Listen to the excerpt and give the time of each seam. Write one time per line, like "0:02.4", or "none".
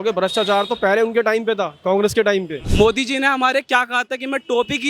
0:02.6